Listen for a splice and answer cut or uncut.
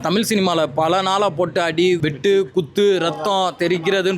cut